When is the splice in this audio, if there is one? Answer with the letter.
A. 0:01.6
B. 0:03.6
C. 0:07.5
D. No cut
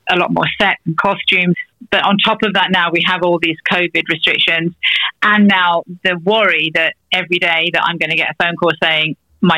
A